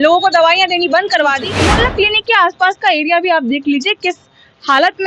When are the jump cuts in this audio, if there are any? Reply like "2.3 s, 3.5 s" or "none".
1.8 s